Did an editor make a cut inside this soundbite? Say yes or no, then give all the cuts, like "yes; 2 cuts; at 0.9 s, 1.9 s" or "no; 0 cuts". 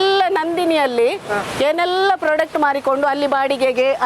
no; 0 cuts